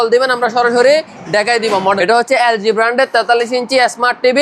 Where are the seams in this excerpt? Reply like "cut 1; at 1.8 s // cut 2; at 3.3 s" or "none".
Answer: cut 1; at 2.0 s